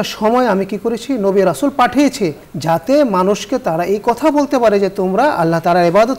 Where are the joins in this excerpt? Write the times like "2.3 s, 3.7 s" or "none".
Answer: none